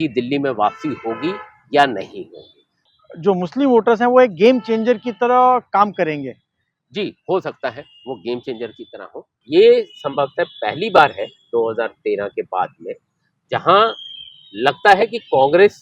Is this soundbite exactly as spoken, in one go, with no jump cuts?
no; 2 cuts; at 2.9 s, 9.4 s

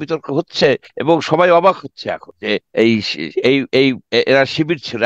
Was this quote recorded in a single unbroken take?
no; 2 cuts; at 0.9 s, 2.4 s

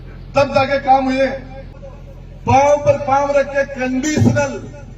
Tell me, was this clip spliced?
yes; 1 cut; at 1.8 s

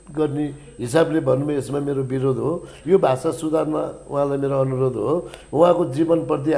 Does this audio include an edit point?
no; 0 cuts

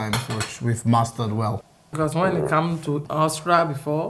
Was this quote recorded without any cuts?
no; 2 cuts; at 1.8 s, 3.1 s

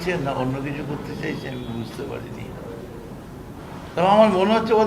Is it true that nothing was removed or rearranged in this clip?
yes; 0 cuts

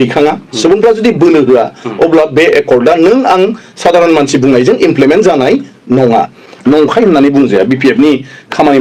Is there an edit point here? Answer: no; 0 cuts

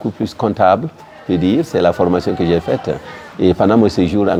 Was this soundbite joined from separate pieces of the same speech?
no; 0 cuts

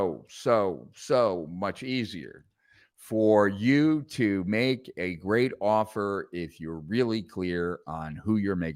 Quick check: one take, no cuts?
yes; 0 cuts

